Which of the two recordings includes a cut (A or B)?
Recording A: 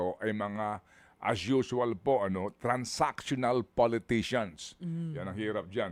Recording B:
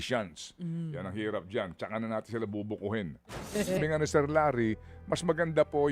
B